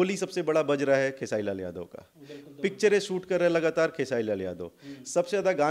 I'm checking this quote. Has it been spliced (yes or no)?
no